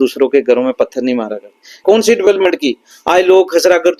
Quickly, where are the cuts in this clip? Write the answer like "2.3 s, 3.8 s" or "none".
1.7 s